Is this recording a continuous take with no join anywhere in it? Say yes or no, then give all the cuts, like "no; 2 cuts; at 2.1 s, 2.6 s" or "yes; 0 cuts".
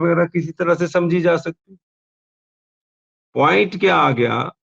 yes; 0 cuts